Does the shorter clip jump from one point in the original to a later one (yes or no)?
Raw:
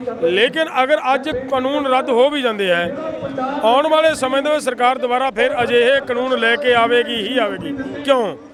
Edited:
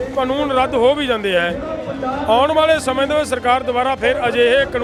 no